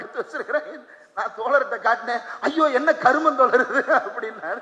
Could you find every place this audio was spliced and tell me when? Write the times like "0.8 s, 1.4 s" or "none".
none